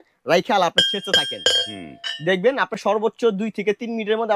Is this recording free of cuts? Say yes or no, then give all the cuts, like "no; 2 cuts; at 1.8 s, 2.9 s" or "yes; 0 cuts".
yes; 0 cuts